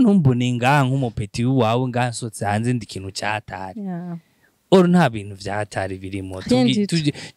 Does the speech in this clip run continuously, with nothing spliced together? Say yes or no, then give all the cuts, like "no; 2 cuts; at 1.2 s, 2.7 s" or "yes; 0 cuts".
yes; 0 cuts